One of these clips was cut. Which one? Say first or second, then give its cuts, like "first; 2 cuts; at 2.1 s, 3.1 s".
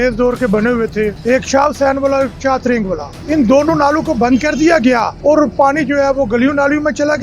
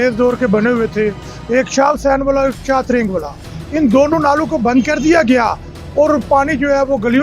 first; 3 cuts; at 1.2 s, 3.1 s, 5.1 s